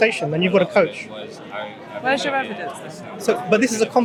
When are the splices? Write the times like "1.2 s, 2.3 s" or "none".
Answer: none